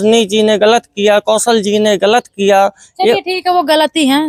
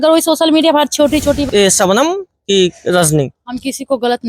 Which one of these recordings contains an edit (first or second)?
second